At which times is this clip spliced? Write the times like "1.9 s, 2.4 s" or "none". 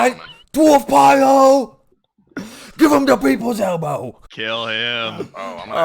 1.8 s, 4.2 s